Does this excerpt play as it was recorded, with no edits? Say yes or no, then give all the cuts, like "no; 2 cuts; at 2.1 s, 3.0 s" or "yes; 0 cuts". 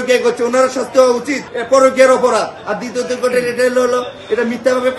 yes; 0 cuts